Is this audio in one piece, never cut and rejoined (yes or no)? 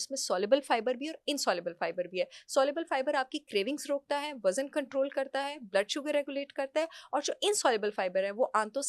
yes